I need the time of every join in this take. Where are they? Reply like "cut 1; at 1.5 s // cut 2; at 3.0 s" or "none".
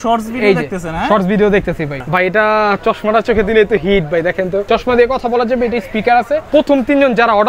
cut 1; at 2.0 s // cut 2; at 4.6 s // cut 3; at 6.4 s